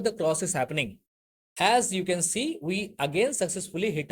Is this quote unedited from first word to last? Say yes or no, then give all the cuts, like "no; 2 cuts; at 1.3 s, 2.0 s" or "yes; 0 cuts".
no; 1 cut; at 1.0 s